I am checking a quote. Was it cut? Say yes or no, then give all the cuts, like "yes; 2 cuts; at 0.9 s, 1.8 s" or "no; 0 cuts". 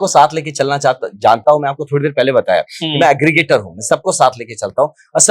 no; 0 cuts